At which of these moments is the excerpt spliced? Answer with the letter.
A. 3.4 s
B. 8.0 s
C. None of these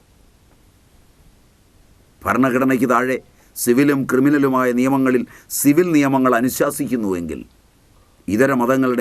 B